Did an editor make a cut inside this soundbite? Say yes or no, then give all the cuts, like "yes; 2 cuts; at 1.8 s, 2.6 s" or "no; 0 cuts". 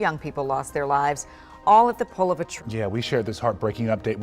yes; 1 cut; at 2.6 s